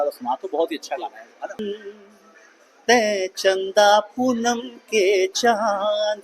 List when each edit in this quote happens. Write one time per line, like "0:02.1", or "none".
0:01.6